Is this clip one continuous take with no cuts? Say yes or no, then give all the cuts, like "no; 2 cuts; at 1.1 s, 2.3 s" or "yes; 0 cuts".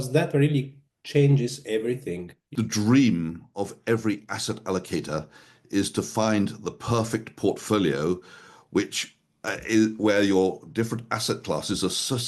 no; 1 cut; at 2.4 s